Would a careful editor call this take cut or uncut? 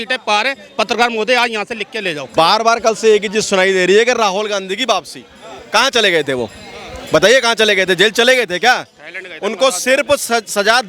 cut